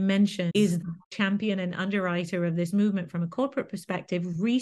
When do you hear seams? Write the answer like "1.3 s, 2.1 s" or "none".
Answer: 0.9 s